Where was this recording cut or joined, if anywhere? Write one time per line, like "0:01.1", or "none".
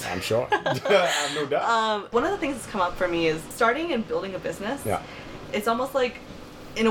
0:02.1
0:03.5